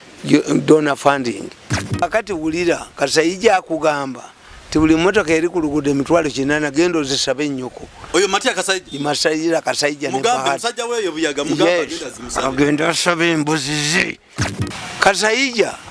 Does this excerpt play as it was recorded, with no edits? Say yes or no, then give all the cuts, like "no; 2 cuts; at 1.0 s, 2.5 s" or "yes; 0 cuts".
no; 2 cuts; at 1.8 s, 14.3 s